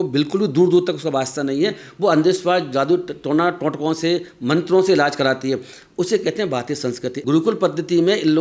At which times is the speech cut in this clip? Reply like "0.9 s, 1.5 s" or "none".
7.1 s